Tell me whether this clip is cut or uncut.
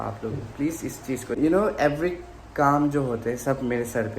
cut